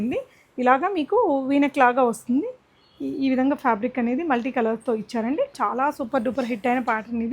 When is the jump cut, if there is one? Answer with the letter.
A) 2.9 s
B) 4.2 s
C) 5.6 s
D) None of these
C